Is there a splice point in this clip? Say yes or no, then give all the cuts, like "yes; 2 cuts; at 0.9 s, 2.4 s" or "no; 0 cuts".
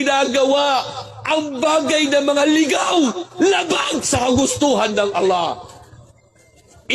no; 0 cuts